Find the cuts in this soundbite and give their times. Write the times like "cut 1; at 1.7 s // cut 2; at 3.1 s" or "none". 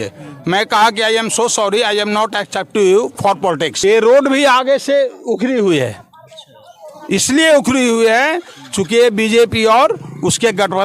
cut 1; at 3.7 s